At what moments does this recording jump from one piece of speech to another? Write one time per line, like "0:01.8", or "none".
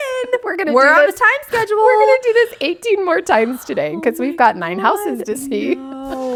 none